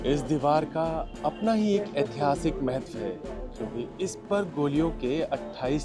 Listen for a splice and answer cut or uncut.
uncut